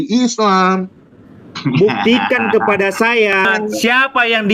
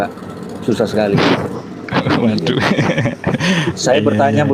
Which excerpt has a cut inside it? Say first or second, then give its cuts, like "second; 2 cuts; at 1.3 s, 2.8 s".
first; 1 cut; at 3.5 s